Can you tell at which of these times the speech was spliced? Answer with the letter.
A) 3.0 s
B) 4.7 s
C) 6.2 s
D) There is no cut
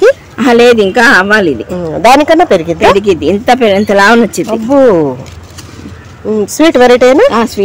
D